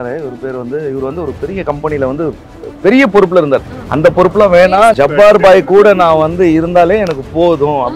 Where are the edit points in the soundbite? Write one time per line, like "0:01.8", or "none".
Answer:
0:05.0